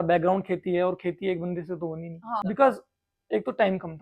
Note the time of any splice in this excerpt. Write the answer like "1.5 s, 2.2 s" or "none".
2.4 s